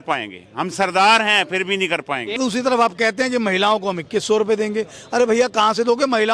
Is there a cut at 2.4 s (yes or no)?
yes